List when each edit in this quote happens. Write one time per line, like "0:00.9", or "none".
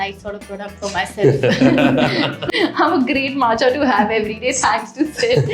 0:02.5